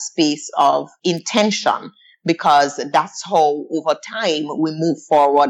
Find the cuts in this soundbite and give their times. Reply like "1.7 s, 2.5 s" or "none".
0.9 s